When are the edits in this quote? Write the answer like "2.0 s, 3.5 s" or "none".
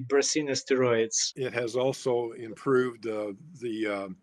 1.2 s